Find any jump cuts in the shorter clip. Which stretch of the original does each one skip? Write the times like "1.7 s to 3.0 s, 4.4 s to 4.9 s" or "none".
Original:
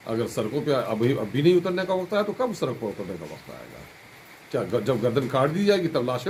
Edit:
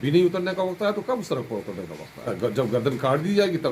3.6 s to 4.6 s